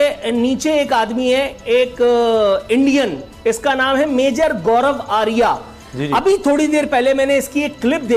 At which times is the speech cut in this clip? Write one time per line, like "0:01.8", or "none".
none